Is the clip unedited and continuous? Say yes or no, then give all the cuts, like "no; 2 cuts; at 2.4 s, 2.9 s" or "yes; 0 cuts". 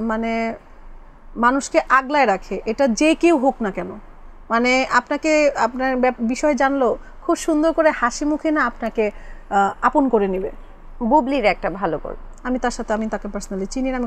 yes; 0 cuts